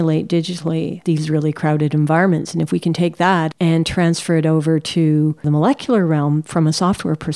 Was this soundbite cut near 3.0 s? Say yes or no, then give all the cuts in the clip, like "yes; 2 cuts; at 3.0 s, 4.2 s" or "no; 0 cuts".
no; 1 cut; at 6.5 s